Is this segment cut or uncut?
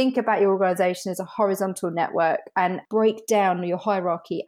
cut